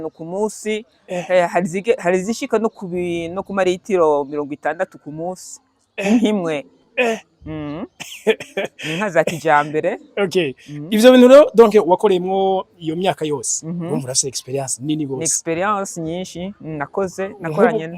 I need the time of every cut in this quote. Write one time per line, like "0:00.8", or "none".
none